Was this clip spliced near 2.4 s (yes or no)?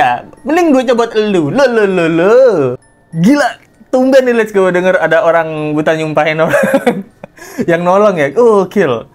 no